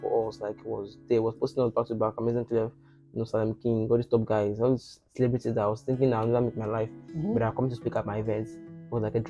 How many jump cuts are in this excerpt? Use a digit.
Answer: 0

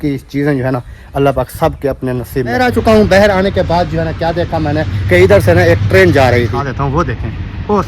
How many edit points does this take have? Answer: 2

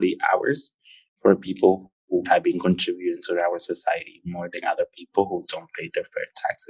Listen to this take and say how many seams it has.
1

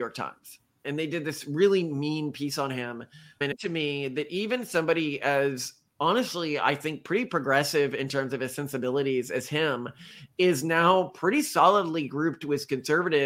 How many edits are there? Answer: 1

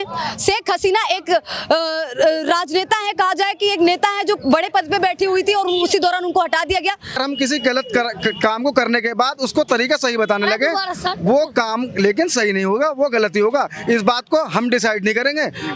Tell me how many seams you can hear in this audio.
1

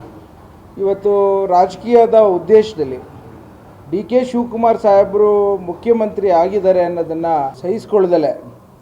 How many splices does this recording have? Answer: 1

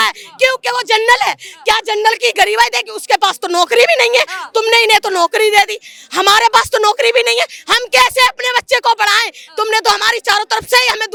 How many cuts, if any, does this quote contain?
0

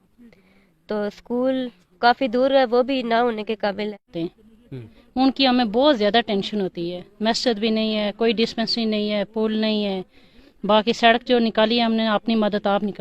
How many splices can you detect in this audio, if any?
1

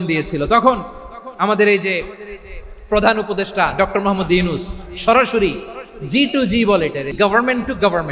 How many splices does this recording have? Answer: 1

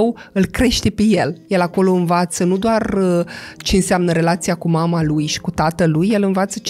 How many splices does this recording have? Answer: 1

